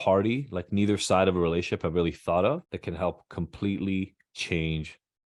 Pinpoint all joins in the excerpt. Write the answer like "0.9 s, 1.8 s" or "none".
none

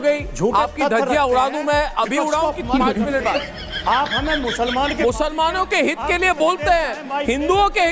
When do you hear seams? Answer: 4.9 s

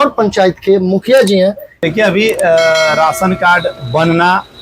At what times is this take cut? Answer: 1.7 s

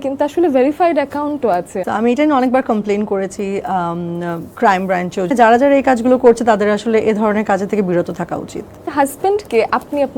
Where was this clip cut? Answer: 1.8 s, 5.3 s, 8.8 s

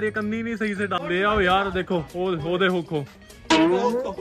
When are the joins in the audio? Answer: 1.0 s

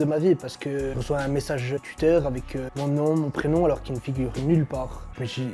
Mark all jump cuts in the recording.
none

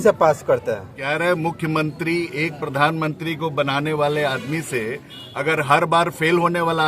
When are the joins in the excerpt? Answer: 0.9 s

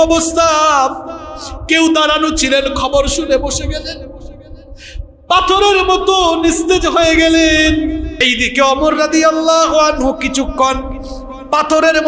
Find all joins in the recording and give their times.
8.2 s

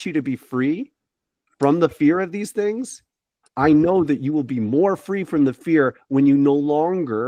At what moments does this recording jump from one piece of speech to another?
none

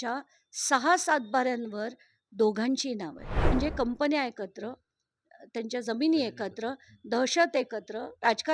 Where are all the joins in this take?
3.3 s

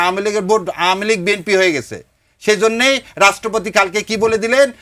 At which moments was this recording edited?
none

